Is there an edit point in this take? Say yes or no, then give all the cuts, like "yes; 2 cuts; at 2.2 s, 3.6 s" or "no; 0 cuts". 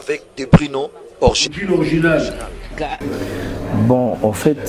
yes; 1 cut; at 2.9 s